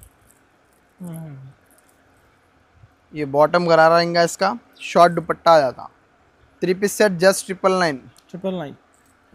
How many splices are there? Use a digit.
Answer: 0